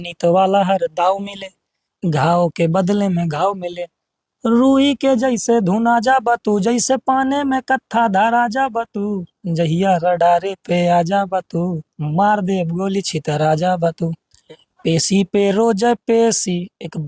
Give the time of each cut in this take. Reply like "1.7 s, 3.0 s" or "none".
14.3 s